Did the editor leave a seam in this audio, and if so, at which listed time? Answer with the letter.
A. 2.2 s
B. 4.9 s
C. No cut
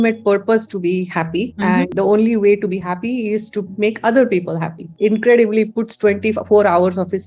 B